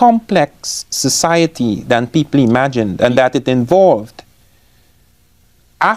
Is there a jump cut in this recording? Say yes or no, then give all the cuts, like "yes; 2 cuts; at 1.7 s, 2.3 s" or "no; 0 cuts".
no; 0 cuts